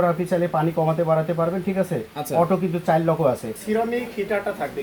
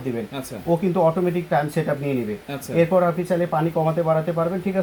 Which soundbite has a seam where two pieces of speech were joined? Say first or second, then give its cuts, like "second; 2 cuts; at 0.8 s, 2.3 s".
first; 1 cut; at 3.6 s